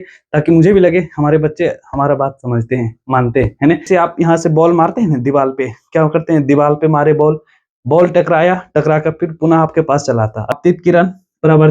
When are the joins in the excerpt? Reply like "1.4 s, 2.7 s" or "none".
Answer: 3.9 s, 10.5 s